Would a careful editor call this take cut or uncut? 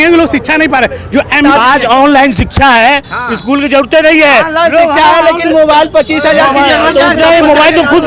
cut